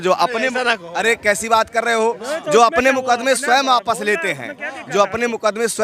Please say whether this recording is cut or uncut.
uncut